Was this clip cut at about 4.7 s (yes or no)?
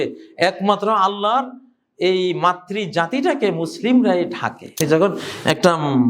yes